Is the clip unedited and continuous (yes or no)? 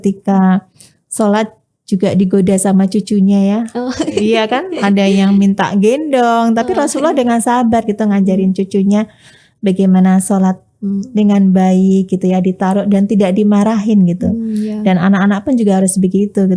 yes